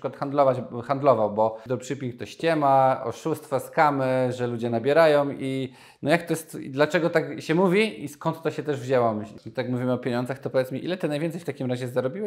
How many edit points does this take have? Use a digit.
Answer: 2